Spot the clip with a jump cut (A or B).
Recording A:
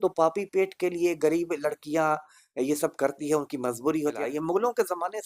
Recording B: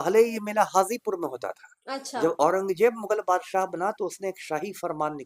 A